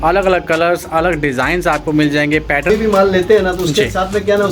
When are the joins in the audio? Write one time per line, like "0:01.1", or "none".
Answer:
0:02.7